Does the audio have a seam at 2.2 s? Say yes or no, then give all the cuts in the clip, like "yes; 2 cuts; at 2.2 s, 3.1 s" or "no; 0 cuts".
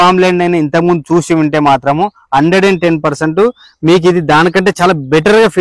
no; 0 cuts